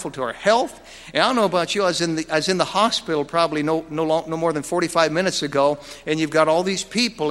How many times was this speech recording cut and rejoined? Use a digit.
0